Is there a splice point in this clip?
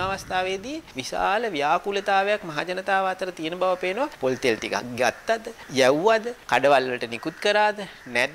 yes; 4 cuts; at 0.9 s, 4.1 s, 5.6 s, 6.4 s

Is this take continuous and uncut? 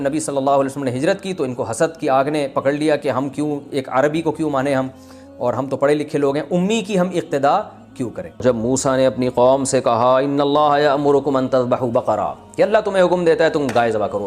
no; 1 cut; at 8.4 s

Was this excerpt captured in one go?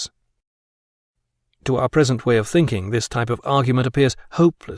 no; 1 cut; at 2.8 s

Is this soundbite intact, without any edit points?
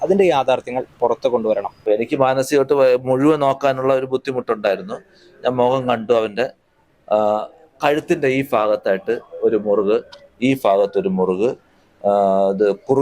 no; 1 cut; at 1.7 s

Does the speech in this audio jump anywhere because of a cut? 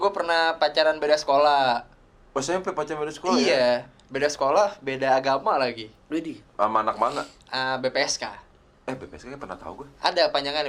no; 0 cuts

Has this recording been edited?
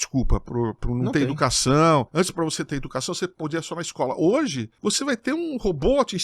yes; 2 cuts; at 2.1 s, 4.7 s

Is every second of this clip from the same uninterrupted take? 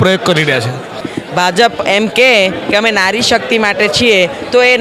no; 1 cut; at 1.1 s

